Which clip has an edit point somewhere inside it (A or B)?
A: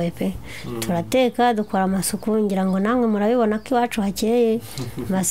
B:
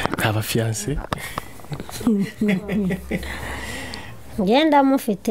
B